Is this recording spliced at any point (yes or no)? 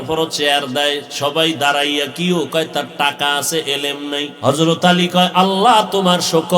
yes